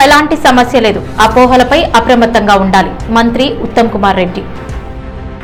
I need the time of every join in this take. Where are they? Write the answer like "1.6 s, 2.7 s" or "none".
none